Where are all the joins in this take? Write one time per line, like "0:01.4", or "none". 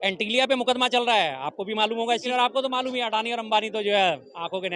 0:02.3